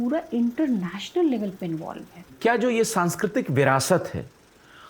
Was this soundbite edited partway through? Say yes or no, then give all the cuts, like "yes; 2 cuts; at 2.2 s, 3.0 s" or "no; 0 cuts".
yes; 1 cut; at 2.4 s